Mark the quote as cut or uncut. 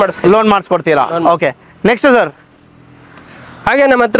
uncut